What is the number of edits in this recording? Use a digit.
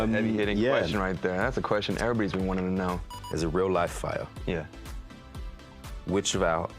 1